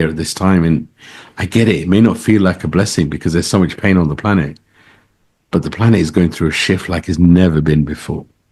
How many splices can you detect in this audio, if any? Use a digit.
0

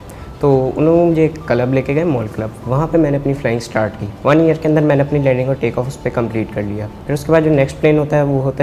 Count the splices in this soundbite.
2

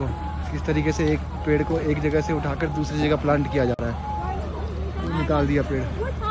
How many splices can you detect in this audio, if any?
0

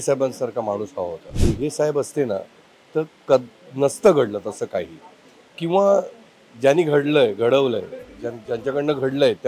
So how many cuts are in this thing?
1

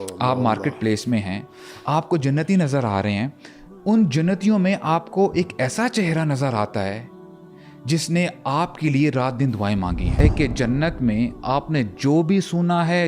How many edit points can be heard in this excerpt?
1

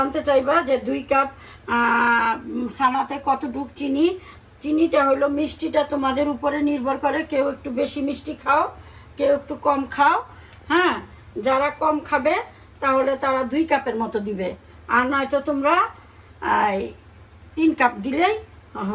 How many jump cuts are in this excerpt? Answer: 0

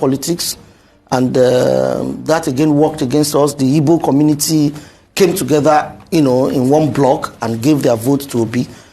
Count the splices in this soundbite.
0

